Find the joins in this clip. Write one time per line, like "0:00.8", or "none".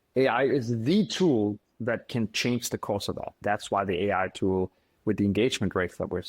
0:03.4